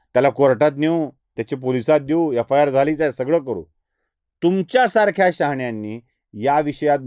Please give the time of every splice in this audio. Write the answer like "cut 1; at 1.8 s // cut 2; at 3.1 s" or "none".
none

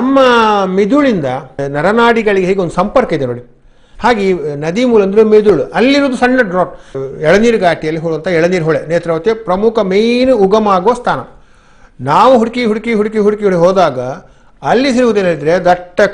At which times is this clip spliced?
cut 1; at 1.6 s // cut 2; at 6.9 s

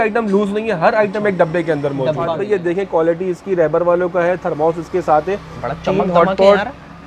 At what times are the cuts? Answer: cut 1; at 2.4 s

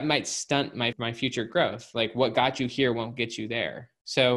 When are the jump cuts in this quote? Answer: cut 1; at 0.9 s

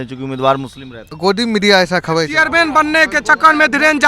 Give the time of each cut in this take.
cut 1; at 1.1 s // cut 2; at 2.3 s

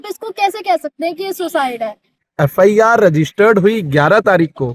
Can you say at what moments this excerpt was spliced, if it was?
cut 1; at 2.2 s

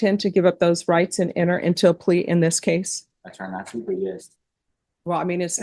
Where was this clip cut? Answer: none

